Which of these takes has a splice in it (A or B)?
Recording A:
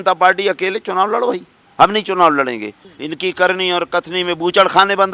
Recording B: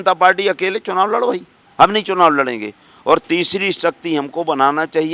A